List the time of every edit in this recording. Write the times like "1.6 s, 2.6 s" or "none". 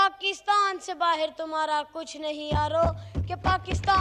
none